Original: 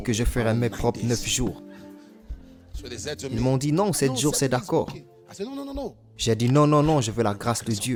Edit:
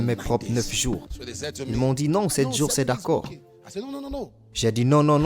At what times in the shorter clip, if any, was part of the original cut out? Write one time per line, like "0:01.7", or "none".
0:01.2